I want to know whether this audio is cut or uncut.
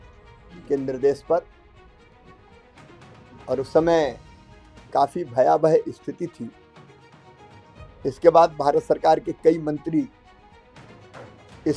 cut